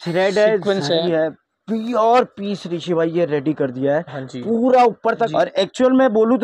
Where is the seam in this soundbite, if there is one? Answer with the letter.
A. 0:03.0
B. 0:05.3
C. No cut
B